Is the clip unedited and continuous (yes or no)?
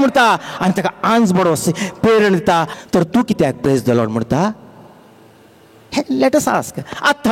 no